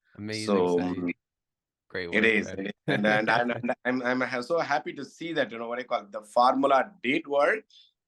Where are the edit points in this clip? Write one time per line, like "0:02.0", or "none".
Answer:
none